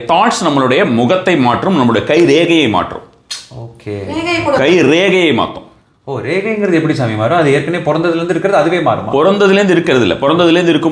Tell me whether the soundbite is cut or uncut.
uncut